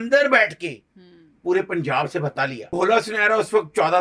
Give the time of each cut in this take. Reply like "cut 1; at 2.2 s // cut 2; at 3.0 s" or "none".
cut 1; at 2.7 s